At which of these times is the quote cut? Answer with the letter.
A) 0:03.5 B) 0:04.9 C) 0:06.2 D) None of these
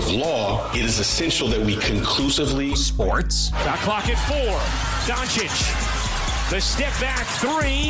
D